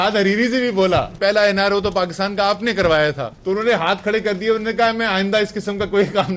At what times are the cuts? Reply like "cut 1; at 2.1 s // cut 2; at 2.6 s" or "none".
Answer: cut 1; at 1.1 s // cut 2; at 3.3 s